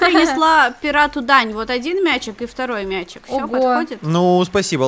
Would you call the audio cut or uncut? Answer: uncut